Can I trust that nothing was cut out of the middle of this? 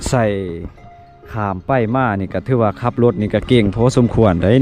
yes; 0 cuts

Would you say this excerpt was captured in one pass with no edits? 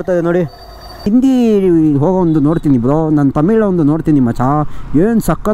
no; 1 cut; at 1.1 s

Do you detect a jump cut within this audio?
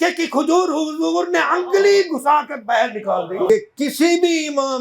yes; 1 cut; at 3.5 s

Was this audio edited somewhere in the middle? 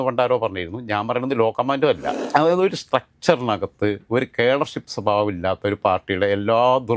yes; 1 cut; at 2.1 s

